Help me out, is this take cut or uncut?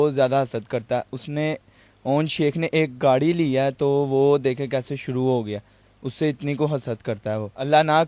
uncut